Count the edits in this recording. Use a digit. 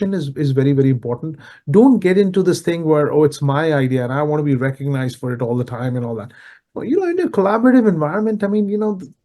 0